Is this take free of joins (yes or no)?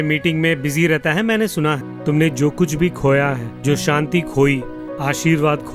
no